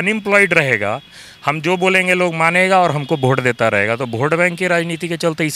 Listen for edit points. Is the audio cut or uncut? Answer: uncut